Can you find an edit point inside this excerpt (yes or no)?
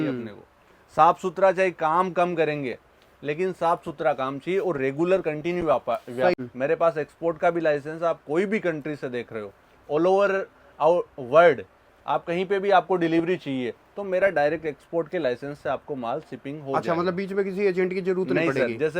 yes